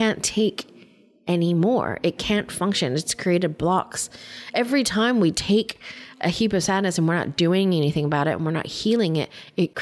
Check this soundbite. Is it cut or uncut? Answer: uncut